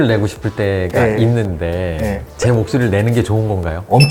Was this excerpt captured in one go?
yes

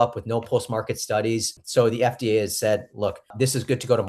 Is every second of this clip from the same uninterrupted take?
no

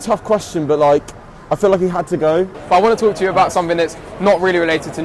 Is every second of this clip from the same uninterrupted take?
no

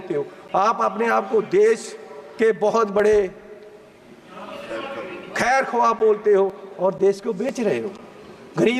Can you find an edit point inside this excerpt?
no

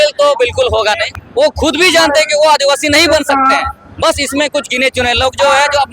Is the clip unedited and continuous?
no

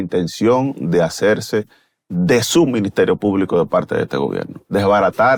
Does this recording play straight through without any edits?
yes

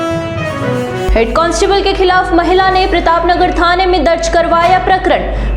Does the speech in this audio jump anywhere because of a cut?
yes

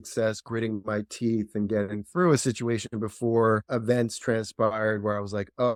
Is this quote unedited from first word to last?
yes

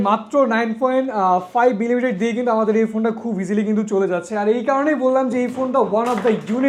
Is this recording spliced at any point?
no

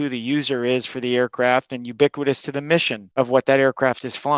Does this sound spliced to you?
yes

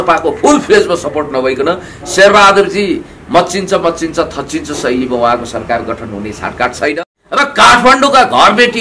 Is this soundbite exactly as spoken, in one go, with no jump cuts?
no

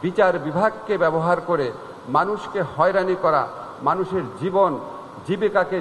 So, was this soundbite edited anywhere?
no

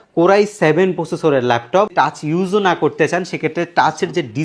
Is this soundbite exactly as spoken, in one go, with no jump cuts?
no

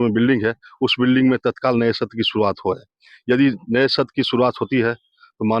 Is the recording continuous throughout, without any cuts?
yes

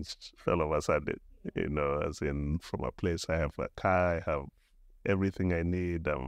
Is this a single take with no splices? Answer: yes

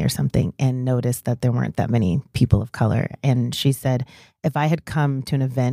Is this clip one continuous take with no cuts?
yes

